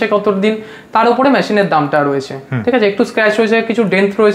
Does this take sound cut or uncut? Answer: uncut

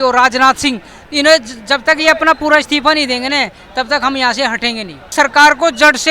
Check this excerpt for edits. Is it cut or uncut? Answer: cut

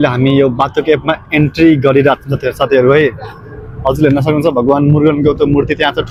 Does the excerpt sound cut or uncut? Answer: uncut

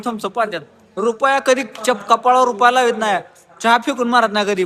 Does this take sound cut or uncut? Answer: uncut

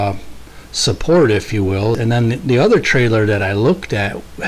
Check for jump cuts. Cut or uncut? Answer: cut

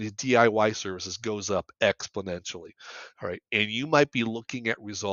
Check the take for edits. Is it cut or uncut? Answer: uncut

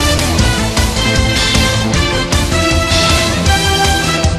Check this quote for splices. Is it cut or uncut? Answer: cut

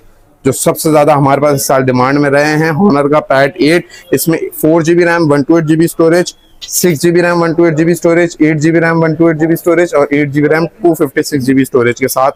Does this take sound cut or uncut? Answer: uncut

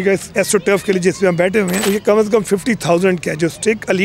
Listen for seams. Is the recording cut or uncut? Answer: cut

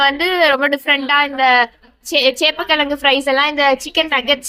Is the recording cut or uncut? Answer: uncut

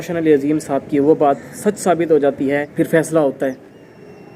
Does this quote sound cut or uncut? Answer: cut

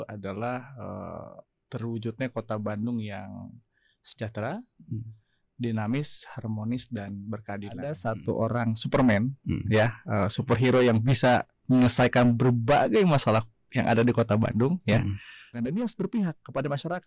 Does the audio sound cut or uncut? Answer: cut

